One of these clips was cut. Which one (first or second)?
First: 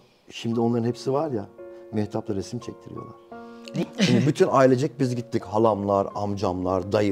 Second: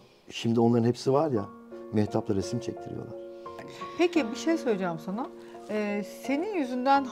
second